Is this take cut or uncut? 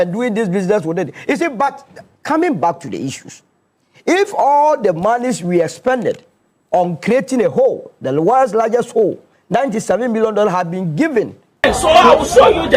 cut